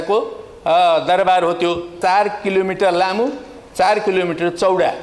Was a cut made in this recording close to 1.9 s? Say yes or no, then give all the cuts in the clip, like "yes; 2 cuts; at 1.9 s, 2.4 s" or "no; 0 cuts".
yes; 1 cut; at 1.9 s